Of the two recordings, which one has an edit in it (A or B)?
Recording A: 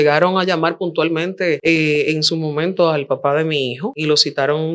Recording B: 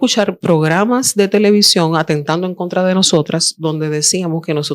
A